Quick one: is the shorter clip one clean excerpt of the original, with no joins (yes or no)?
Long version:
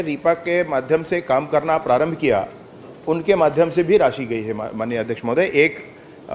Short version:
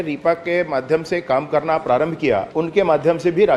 no